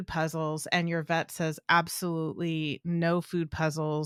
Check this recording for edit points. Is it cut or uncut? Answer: uncut